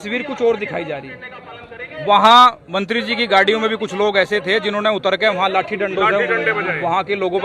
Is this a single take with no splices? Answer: yes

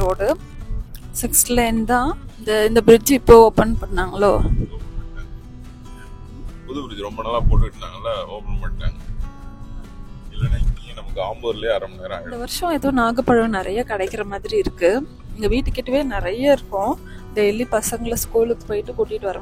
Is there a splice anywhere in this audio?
yes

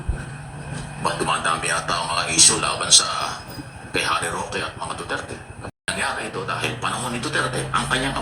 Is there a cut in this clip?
yes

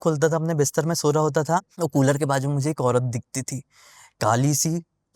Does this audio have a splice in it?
yes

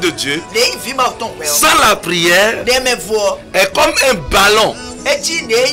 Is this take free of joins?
yes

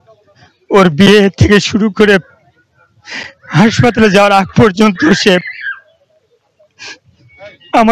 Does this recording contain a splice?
no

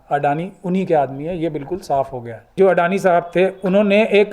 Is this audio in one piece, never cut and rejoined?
no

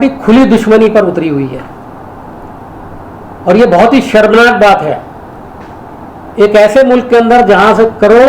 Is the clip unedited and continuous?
yes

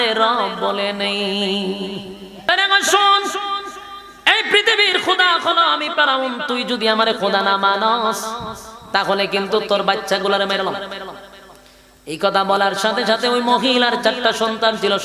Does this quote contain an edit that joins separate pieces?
yes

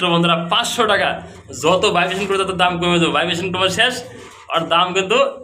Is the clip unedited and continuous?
yes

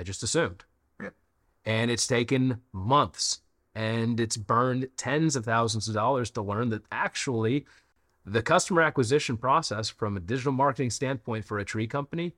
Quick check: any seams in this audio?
no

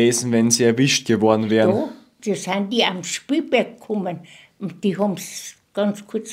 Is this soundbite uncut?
no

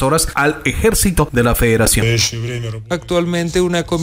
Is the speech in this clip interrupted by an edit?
yes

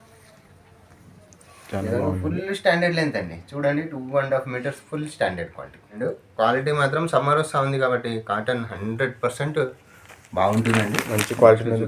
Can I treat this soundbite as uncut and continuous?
no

